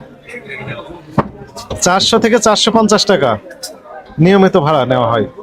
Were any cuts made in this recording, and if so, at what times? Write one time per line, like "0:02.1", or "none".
none